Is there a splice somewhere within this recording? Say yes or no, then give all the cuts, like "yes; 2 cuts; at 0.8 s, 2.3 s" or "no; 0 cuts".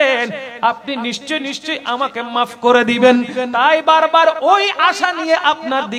no; 0 cuts